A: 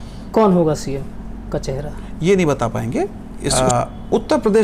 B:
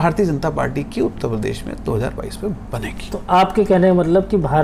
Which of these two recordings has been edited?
A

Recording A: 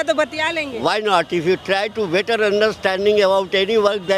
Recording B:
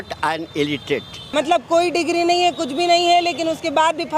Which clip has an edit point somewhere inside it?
B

